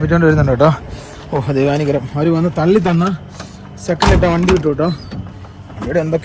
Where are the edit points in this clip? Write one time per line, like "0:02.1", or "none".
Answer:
none